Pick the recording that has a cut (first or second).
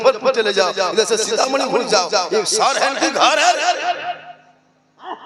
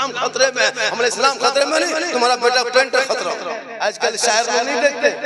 second